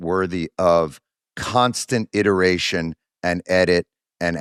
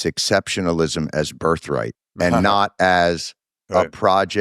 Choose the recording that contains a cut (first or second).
second